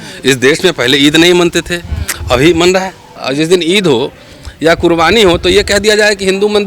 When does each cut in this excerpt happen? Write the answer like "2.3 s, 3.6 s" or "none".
3.1 s